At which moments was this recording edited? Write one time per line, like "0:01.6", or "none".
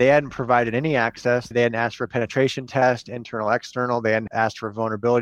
0:01.5
0:04.3